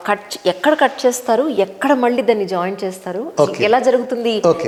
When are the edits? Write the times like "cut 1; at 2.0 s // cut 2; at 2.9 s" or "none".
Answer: none